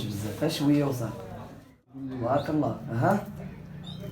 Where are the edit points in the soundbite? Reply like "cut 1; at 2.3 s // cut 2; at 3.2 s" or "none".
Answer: cut 1; at 1.7 s